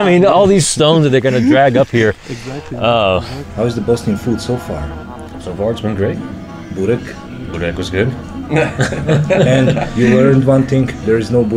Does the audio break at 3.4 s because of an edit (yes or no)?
yes